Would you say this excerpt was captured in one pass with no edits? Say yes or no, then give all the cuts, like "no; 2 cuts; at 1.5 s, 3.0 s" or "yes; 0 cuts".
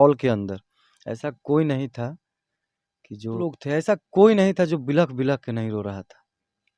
no; 1 cut; at 3.4 s